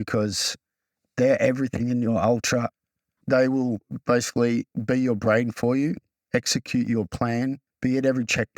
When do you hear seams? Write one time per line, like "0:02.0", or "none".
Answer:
0:03.2
0:04.7
0:07.7